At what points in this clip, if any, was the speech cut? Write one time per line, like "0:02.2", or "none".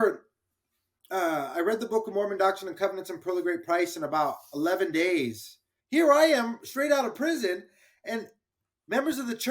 0:05.8